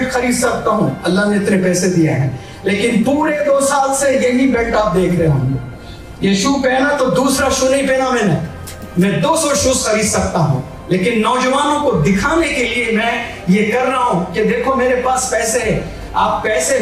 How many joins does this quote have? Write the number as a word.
zero